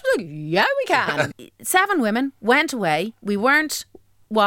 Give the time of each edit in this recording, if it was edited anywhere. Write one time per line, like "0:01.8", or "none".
0:01.3
0:03.2